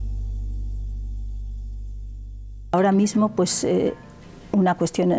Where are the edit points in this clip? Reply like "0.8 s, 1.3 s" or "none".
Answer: 2.7 s